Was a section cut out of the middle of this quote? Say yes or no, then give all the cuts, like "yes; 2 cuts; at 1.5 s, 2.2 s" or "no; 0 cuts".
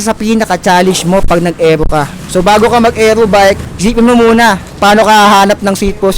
yes; 3 cuts; at 2.2 s, 3.7 s, 4.7 s